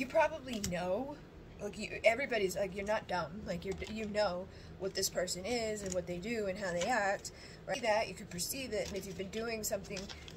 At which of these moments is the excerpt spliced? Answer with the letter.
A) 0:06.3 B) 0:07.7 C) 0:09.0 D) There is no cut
B